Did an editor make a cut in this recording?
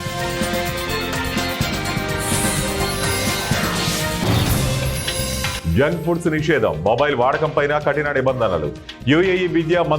yes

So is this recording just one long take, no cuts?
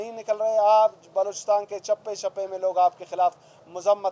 yes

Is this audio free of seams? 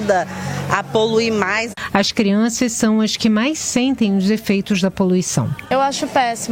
yes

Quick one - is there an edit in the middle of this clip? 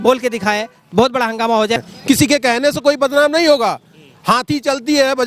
yes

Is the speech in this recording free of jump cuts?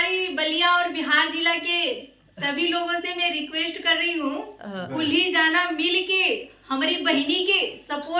yes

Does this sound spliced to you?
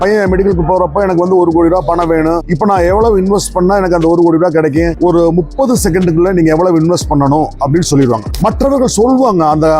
yes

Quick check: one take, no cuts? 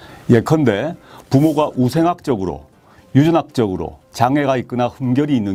yes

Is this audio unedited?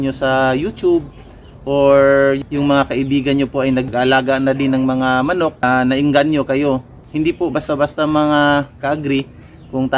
no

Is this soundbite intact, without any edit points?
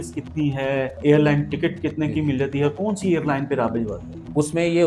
yes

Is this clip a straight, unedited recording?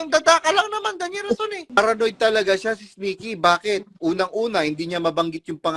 no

